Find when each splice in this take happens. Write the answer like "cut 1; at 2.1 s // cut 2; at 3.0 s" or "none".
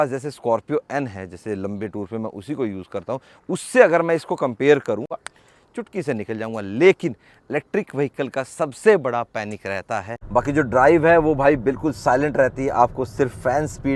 cut 1; at 5.1 s // cut 2; at 10.2 s